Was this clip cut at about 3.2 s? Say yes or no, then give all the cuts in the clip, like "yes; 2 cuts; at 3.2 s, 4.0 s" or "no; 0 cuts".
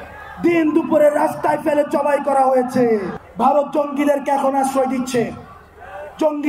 yes; 1 cut; at 3.2 s